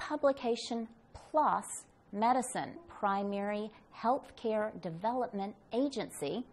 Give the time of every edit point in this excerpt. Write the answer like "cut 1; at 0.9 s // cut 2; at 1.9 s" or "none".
none